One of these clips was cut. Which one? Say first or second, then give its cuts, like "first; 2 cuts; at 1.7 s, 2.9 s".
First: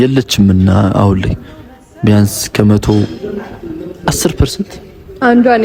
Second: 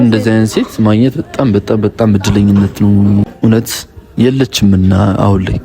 second; 1 cut; at 3.3 s